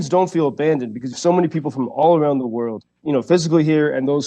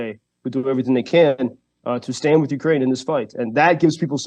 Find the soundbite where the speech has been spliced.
first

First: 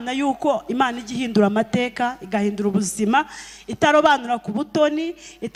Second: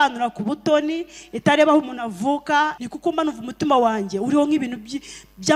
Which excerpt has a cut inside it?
second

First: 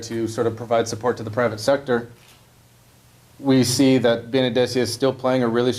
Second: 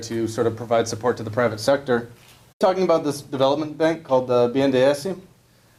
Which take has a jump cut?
first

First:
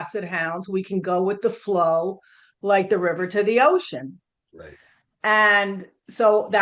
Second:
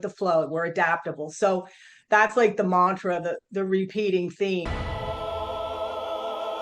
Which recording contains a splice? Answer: second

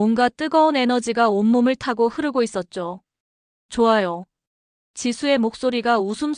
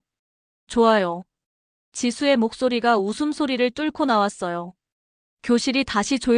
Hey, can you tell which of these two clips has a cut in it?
second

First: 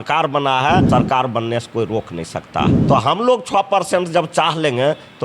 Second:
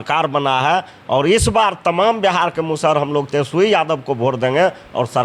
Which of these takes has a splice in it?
first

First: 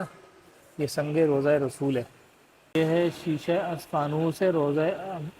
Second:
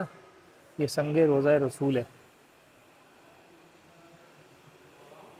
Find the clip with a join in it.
first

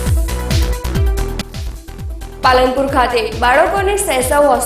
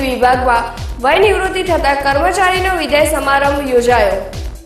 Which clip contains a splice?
first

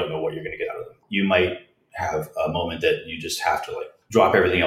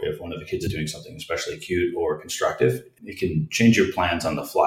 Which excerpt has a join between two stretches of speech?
first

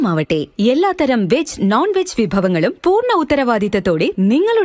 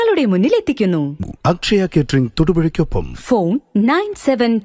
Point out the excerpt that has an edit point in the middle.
second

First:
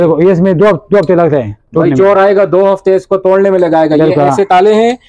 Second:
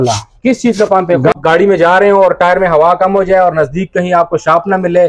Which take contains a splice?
second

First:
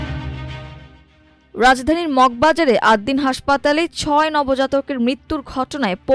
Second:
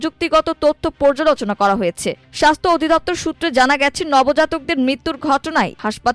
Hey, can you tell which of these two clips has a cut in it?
first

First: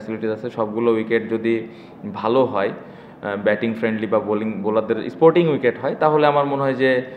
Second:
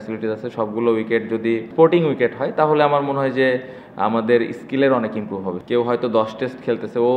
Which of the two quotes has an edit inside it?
second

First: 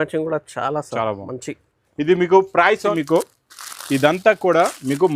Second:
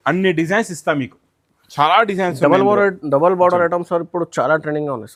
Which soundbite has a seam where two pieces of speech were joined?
first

